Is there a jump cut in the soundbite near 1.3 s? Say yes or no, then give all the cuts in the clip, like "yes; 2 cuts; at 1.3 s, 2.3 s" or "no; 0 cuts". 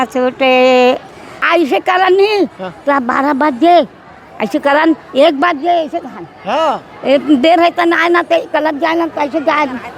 yes; 1 cut; at 1.3 s